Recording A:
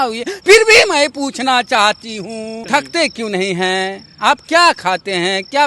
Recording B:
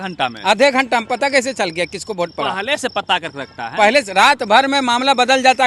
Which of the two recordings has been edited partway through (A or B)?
A